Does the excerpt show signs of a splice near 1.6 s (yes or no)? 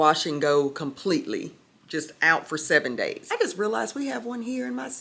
no